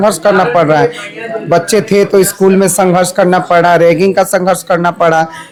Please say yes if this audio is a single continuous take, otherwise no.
yes